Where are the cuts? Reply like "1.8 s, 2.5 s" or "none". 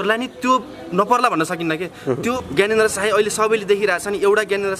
2.3 s